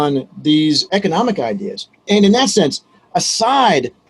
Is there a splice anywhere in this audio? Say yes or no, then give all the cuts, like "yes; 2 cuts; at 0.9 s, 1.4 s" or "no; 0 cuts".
yes; 1 cut; at 2.1 s